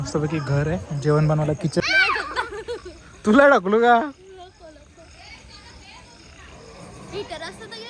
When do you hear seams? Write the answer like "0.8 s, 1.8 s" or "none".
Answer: 1.8 s

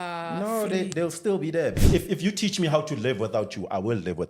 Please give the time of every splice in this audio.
1.8 s

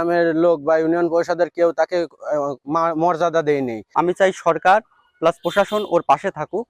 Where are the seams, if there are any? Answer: 3.8 s

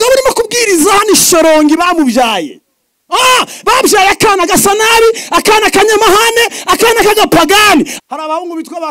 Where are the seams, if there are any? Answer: 7.9 s

